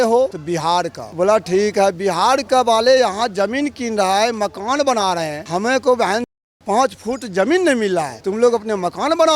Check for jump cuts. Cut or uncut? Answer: uncut